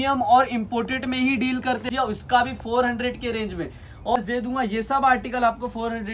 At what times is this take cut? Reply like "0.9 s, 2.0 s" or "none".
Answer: 1.8 s, 4.2 s